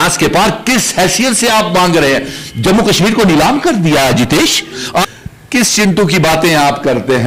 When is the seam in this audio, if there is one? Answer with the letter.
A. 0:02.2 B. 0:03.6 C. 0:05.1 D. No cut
C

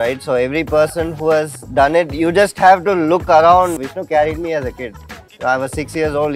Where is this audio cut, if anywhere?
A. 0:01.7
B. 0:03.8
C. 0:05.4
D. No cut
B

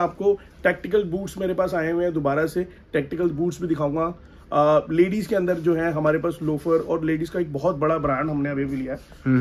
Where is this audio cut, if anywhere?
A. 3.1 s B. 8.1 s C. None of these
C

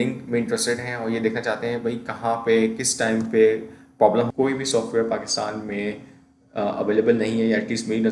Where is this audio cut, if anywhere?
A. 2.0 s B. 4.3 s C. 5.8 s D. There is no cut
B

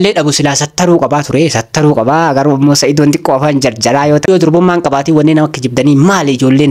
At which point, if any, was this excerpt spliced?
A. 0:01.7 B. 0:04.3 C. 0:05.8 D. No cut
B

